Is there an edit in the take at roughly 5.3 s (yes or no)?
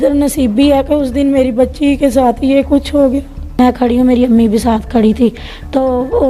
no